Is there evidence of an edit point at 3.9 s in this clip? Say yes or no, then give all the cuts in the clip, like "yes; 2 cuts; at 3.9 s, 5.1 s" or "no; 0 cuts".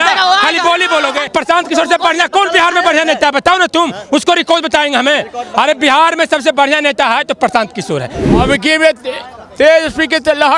no; 2 cuts; at 1.3 s, 8.2 s